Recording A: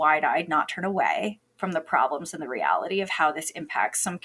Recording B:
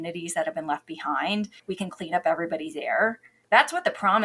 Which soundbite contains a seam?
B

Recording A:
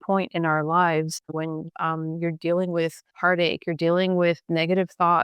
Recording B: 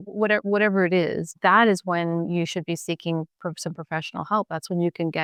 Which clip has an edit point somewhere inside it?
A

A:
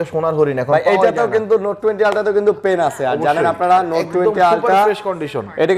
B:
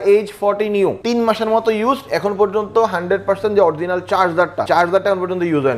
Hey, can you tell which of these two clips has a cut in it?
B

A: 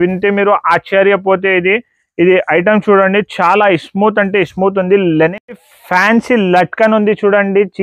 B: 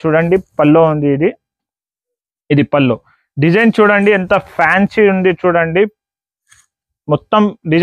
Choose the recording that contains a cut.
A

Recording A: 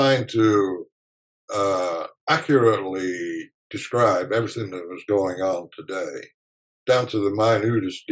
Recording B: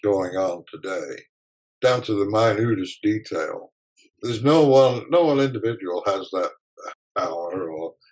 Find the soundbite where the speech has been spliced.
B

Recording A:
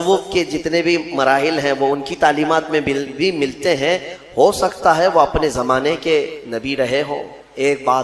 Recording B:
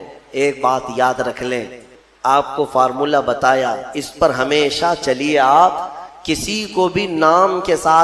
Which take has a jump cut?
B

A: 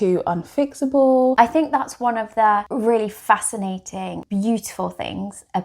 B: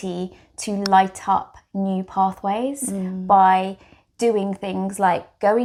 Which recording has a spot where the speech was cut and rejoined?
A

